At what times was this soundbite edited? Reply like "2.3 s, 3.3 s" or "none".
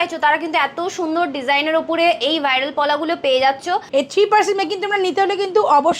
3.9 s